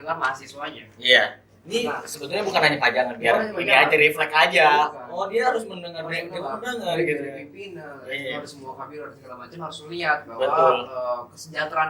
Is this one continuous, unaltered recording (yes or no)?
yes